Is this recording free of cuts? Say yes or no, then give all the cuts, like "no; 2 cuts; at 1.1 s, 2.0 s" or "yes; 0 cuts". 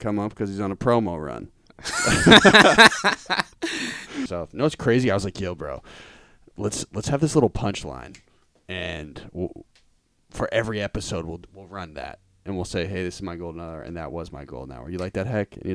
no; 1 cut; at 4.3 s